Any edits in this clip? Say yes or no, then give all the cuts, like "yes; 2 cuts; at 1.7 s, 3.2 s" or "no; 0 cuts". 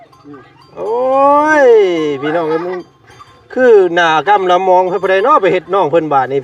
no; 0 cuts